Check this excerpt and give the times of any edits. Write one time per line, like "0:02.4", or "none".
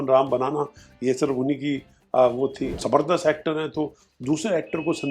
0:02.6